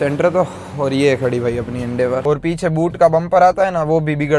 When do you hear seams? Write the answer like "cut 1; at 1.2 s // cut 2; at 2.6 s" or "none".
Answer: cut 1; at 2.2 s